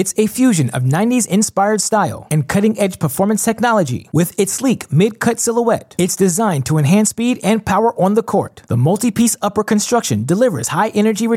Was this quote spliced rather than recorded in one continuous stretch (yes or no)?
no